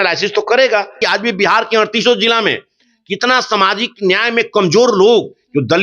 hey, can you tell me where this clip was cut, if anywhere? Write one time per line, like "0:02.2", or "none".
0:01.0